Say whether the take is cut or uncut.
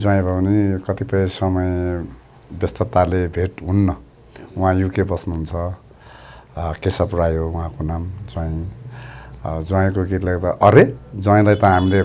uncut